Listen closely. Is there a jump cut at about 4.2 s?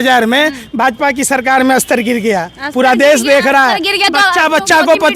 no; 0 cuts

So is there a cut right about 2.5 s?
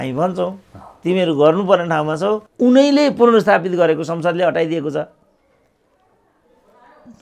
yes; 1 cut; at 2.5 s

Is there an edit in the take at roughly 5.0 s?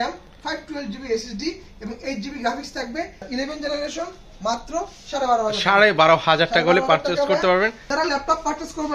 no; 2 cuts; at 3.2 s, 7.9 s

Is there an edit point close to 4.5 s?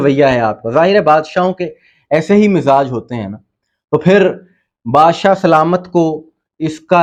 no; 0 cuts

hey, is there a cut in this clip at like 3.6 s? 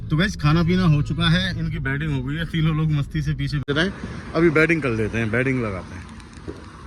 yes; 1 cut; at 3.6 s

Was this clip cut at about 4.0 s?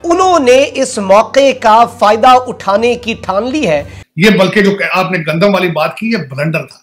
yes; 1 cut; at 4.0 s

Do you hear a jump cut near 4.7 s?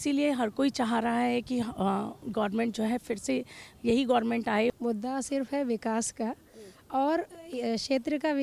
yes; 1 cut; at 4.7 s

